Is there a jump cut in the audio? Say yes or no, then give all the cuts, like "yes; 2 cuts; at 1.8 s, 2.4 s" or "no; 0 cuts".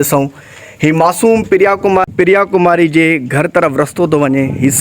yes; 1 cut; at 2.1 s